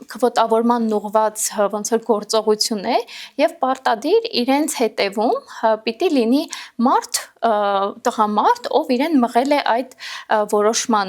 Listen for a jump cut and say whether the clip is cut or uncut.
uncut